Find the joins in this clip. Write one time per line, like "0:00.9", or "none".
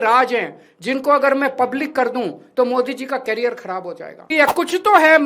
0:04.3